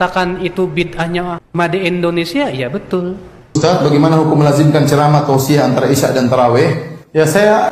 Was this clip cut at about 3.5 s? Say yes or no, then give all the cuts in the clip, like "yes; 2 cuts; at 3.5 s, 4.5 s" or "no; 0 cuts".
yes; 1 cut; at 3.5 s